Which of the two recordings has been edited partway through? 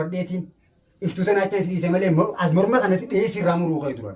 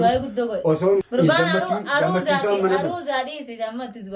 second; 1 cut; at 1.1 s

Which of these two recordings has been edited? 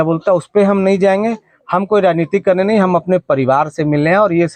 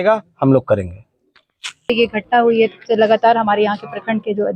second; 1 cut; at 1.9 s

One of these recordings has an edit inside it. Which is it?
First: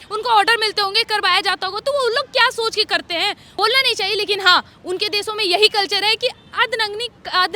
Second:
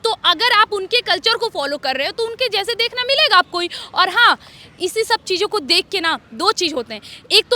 first; 1 cut; at 3.4 s

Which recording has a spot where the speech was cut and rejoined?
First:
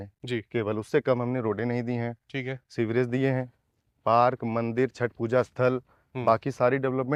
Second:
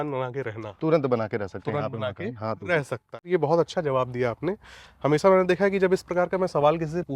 second; 1 cut; at 3.3 s

